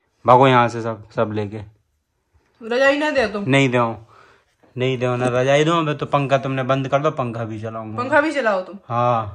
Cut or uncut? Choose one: uncut